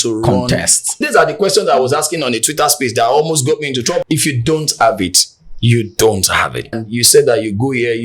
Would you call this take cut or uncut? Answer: cut